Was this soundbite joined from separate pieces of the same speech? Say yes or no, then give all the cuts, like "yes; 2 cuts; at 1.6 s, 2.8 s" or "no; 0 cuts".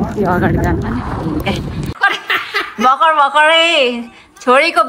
yes; 1 cut; at 2.0 s